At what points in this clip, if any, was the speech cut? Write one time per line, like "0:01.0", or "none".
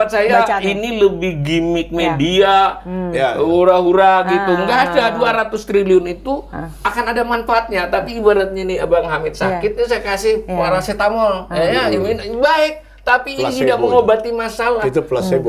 none